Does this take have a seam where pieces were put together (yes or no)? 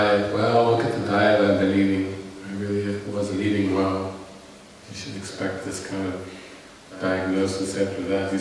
yes